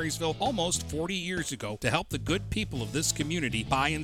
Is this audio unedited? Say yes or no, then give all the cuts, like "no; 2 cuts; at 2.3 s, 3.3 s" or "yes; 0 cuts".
yes; 0 cuts